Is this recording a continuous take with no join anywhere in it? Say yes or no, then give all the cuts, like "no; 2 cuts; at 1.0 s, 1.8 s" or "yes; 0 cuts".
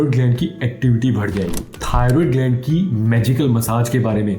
no; 1 cut; at 1.8 s